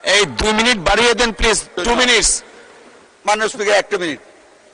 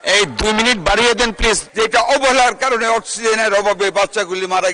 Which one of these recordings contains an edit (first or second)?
second